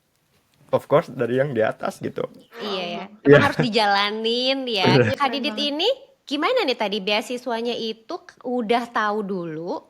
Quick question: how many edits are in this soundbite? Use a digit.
1